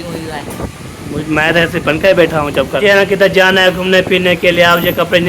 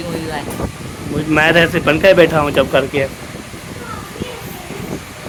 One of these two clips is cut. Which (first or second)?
first